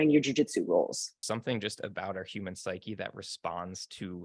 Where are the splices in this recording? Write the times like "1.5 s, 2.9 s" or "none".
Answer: 1.2 s